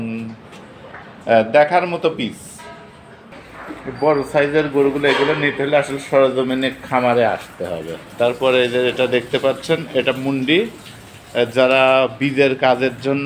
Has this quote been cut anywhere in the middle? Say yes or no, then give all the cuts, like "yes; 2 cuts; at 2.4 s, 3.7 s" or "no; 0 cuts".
yes; 2 cuts; at 3.2 s, 8.0 s